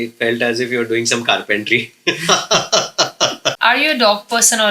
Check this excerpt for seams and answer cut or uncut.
cut